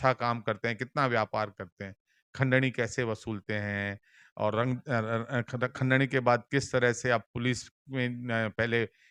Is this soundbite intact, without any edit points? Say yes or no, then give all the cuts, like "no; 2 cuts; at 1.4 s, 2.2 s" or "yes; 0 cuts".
yes; 0 cuts